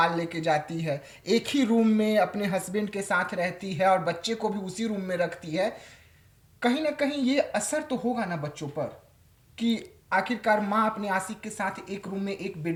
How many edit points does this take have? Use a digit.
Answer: 0